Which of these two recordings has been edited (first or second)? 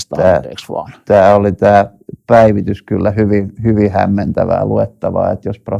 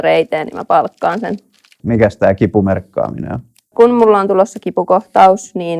second